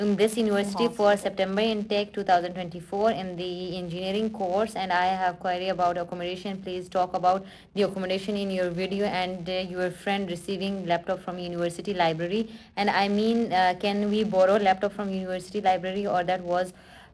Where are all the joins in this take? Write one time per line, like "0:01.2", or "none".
none